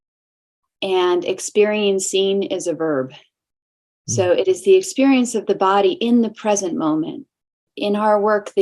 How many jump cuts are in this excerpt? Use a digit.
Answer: 1